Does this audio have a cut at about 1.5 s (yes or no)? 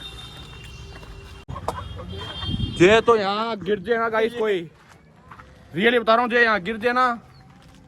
yes